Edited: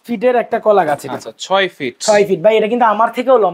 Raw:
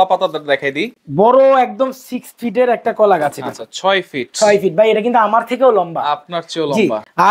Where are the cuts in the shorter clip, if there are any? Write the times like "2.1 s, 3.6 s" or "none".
none